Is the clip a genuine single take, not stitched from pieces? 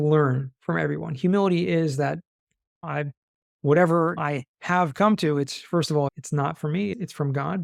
yes; 0 cuts

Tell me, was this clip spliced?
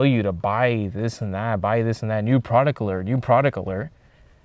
no; 0 cuts

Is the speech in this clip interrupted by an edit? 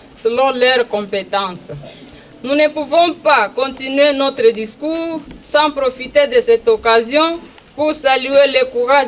no; 0 cuts

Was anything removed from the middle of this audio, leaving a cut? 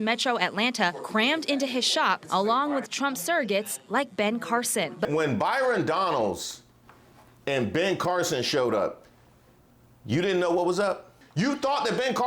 yes; 2 cuts; at 5.1 s, 11.2 s

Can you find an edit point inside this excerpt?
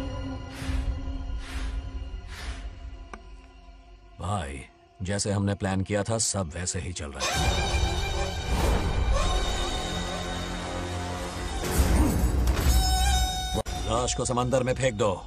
no; 0 cuts

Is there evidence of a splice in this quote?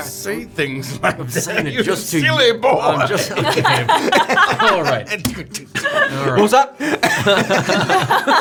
no; 0 cuts

